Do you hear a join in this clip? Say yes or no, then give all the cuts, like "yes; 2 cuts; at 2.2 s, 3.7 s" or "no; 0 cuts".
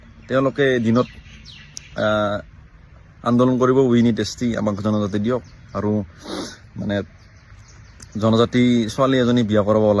no; 0 cuts